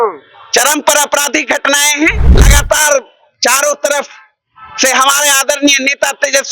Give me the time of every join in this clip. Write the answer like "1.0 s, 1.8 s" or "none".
2.5 s